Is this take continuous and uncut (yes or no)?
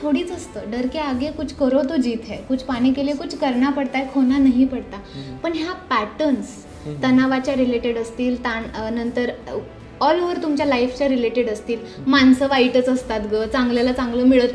yes